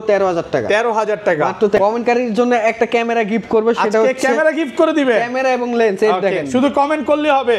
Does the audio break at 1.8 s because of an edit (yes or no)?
yes